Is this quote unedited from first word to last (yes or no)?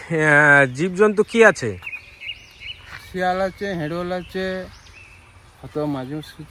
yes